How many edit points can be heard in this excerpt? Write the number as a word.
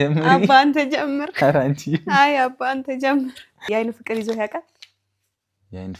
one